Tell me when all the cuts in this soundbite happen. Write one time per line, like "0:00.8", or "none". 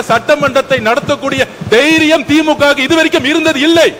none

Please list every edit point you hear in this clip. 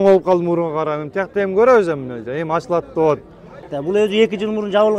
0:03.7

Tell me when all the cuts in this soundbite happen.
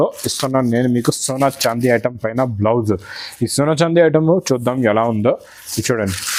none

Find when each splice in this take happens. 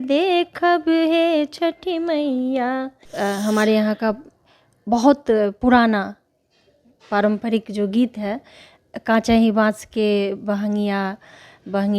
0:03.1

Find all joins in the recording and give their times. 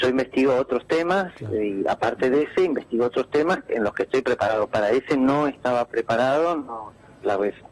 0:05.4

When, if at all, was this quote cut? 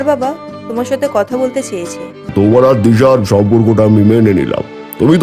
0:02.3

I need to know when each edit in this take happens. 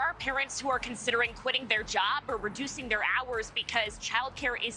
none

